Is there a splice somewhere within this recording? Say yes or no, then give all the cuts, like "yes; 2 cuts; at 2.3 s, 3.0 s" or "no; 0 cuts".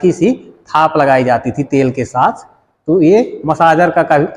no; 0 cuts